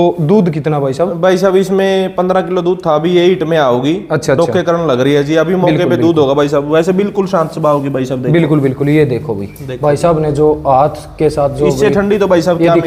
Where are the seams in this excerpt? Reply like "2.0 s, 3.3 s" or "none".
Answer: none